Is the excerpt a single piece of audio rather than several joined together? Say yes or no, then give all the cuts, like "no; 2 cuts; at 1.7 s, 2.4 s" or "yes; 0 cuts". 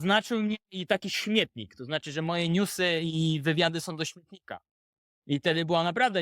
yes; 0 cuts